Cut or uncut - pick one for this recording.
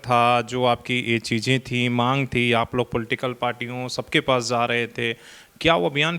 uncut